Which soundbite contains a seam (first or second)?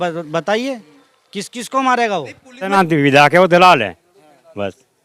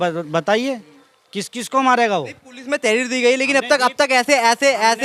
first